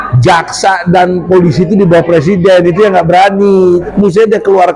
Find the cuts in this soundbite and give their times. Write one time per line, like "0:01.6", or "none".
0:03.9